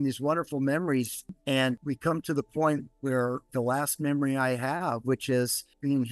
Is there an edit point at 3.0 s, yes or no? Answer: no